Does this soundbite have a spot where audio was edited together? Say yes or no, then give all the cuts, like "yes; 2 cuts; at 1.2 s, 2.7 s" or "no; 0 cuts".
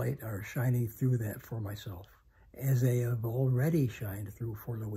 no; 0 cuts